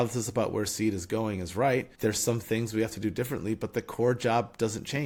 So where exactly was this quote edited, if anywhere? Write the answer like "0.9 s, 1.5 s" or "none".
none